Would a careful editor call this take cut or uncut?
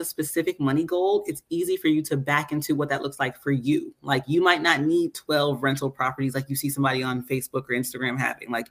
uncut